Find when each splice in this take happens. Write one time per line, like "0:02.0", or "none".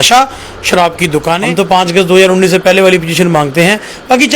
0:01.4